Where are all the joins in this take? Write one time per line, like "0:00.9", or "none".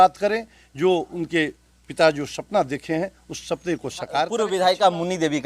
0:04.4